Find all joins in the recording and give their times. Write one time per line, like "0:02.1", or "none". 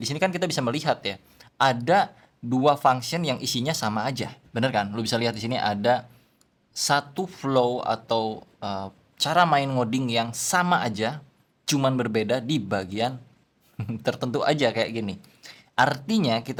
none